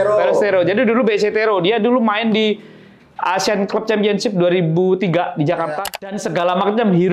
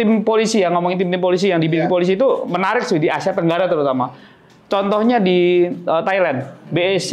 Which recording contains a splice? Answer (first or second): first